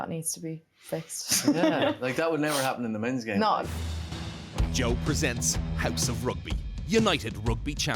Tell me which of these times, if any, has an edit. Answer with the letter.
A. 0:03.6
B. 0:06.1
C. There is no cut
A